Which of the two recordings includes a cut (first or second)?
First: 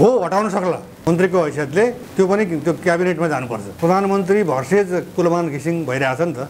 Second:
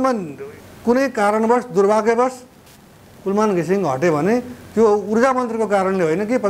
first